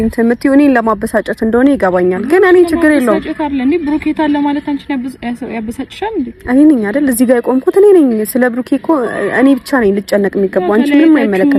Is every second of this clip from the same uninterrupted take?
yes; 0 cuts

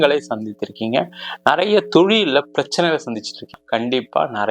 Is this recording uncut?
no; 1 cut; at 3.5 s

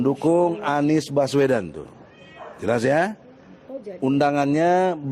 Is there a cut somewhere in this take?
no; 0 cuts

